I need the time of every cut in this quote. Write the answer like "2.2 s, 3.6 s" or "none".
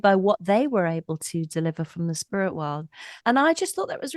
3.2 s